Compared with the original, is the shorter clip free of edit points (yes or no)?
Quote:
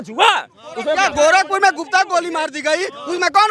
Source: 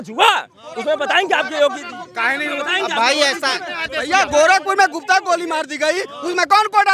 no